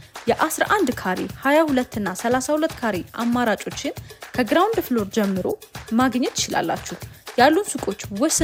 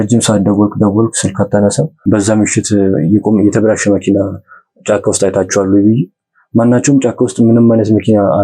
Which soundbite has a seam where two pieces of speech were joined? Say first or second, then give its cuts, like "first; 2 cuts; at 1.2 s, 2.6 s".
second; 1 cut; at 1.9 s